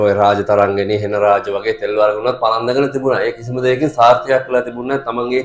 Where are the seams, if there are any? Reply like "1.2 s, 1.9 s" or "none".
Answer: none